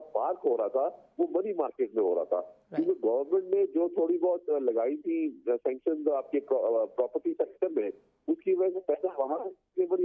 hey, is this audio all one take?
yes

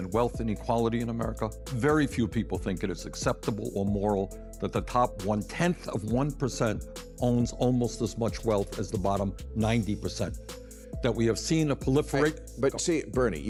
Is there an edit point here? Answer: no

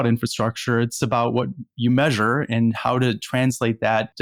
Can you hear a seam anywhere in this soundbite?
no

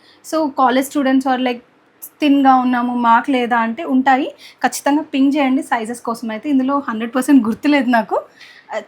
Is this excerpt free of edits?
yes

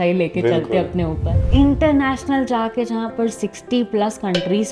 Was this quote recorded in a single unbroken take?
no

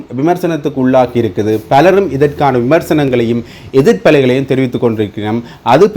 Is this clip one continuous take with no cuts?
yes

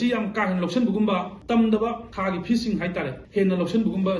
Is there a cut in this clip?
yes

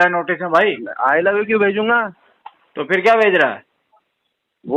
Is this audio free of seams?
yes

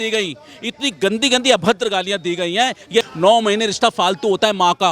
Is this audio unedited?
no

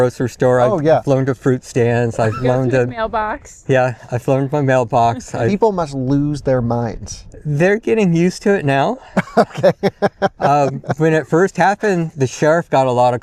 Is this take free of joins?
yes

